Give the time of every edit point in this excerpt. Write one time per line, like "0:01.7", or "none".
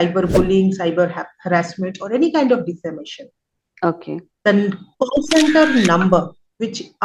none